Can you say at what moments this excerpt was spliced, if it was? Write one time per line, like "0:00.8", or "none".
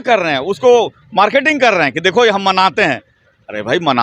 none